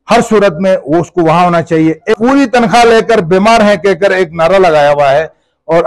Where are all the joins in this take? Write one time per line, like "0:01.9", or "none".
0:02.0